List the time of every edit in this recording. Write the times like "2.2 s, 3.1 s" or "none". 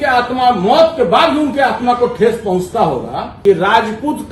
3.2 s